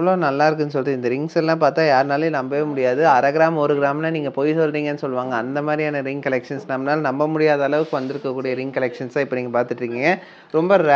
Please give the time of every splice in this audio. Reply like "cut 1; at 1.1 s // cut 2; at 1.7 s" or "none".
none